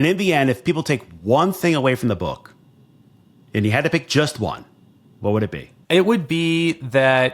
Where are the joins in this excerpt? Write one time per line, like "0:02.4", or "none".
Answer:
0:05.7

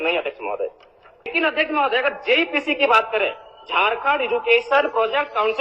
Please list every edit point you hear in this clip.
0:01.3

